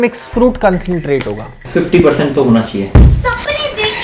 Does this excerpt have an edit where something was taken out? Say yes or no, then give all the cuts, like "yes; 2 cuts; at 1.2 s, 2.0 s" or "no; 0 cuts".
yes; 1 cut; at 1.6 s